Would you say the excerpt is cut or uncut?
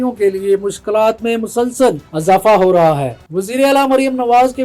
cut